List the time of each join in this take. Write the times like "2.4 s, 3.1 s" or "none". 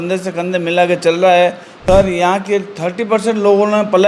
1.7 s